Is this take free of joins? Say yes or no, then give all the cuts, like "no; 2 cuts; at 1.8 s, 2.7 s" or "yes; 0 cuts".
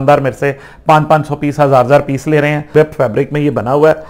no; 1 cut; at 2.7 s